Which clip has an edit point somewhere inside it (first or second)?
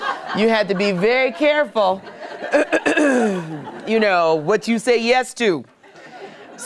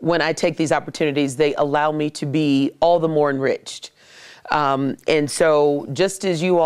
second